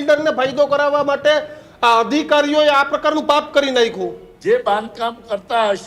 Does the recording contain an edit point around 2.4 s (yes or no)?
no